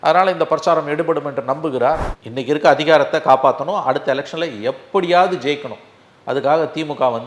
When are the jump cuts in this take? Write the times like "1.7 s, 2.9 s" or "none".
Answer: 2.2 s